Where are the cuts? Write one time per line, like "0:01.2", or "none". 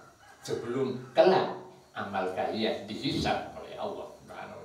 none